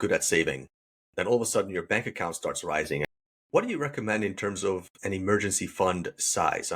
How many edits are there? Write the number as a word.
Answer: one